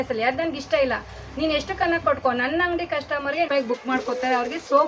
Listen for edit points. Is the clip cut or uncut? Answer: cut